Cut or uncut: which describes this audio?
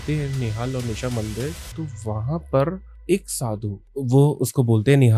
uncut